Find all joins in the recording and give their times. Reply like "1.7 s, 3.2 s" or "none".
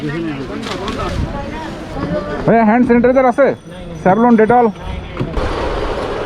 1.9 s, 5.4 s